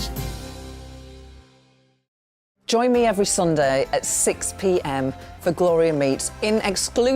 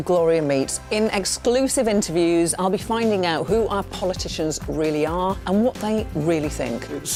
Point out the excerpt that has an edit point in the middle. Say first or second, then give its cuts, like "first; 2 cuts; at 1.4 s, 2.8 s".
first; 1 cut; at 2.3 s